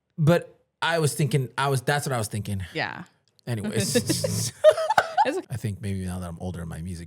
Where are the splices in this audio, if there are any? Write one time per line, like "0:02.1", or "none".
0:05.5